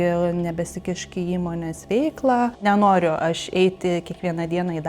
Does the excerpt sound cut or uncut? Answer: cut